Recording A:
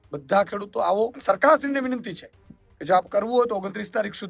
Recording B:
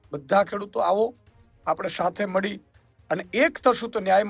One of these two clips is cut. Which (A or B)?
A